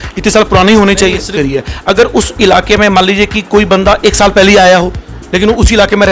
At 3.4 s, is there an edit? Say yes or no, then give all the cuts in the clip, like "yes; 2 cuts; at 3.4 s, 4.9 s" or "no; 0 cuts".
no; 1 cut; at 1.3 s